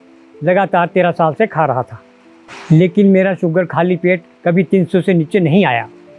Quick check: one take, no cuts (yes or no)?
yes